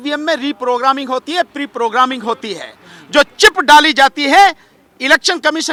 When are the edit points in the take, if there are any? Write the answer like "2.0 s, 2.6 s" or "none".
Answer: none